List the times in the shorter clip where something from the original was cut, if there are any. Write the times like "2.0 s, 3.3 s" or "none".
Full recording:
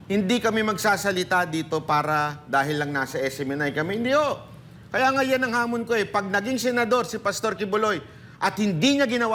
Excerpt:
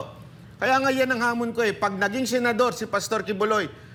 none

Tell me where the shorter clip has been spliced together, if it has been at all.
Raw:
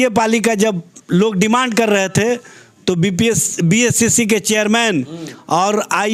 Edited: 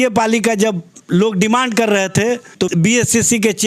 2.6 s

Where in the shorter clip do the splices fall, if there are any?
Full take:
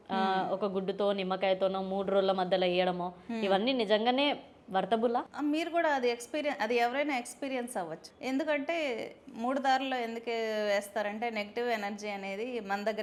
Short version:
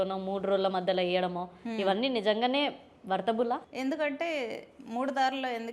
3.7 s

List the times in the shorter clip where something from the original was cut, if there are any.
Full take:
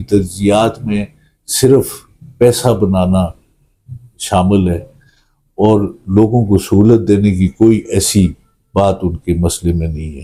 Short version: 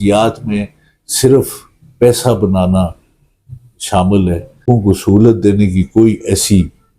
4.7 s

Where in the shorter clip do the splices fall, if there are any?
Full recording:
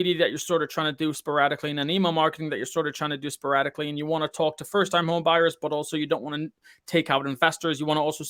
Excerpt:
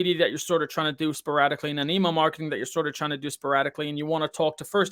none

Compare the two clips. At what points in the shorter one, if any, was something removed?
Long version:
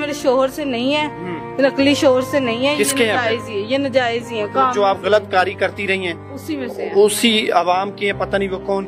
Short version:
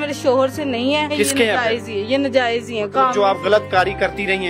1.1 s

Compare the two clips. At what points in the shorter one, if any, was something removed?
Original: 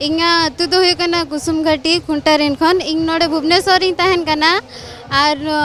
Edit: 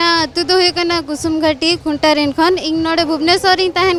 none

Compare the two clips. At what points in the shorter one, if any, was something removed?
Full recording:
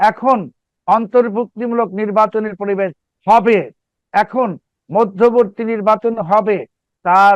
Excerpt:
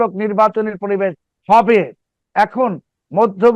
none

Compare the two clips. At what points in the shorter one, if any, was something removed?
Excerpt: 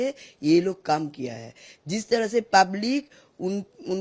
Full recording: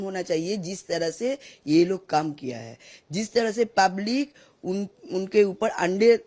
none

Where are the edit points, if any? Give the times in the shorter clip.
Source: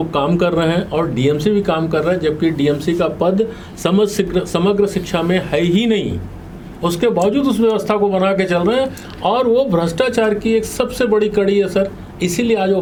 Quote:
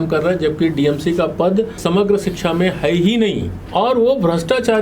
1.8 s, 3.6 s

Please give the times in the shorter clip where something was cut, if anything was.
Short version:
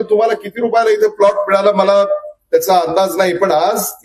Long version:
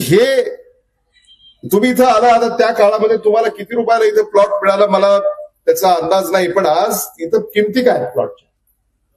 none

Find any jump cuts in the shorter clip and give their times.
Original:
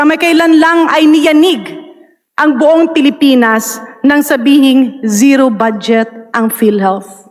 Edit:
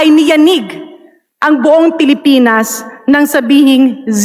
none

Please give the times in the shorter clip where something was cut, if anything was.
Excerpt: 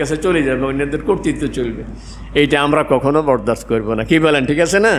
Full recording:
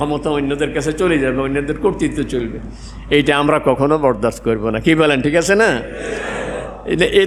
none

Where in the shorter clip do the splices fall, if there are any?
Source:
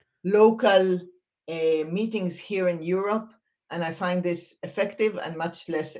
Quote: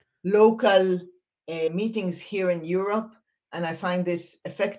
1.7 s

